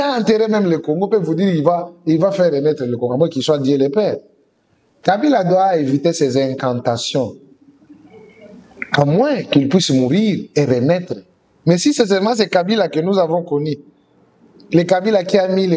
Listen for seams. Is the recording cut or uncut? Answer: uncut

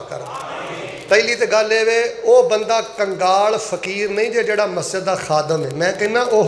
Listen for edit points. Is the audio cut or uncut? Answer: uncut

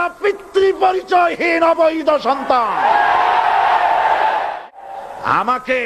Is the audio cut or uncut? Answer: cut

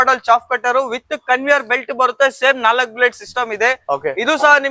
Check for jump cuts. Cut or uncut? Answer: uncut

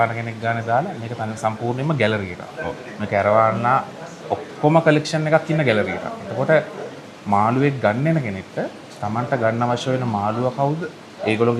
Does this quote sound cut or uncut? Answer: uncut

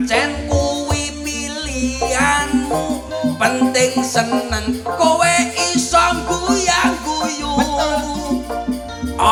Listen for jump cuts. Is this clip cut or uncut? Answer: uncut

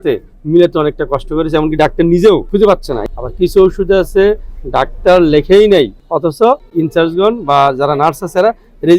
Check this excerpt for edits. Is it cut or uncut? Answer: cut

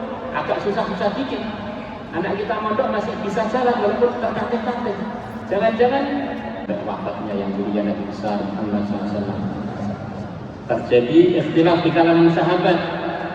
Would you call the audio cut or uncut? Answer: cut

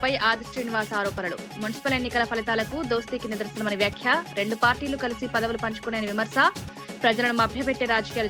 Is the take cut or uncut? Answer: uncut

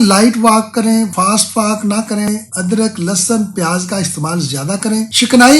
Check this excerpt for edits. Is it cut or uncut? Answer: cut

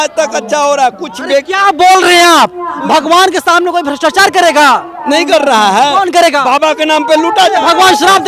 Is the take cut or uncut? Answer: uncut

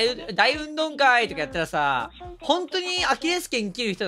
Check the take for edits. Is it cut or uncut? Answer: uncut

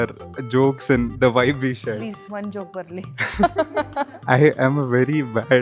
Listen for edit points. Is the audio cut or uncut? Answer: uncut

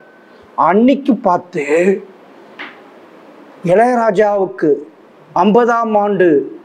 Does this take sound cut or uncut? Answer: uncut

